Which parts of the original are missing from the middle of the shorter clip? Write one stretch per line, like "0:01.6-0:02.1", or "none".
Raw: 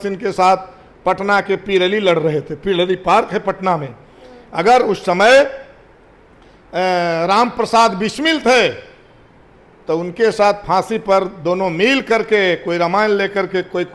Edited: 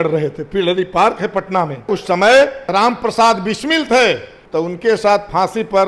0:04.0-0:04.9
0:05.7-0:07.2
0:08.9-0:09.7